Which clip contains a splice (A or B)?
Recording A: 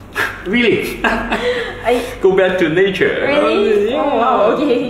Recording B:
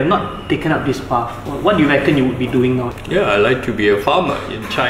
B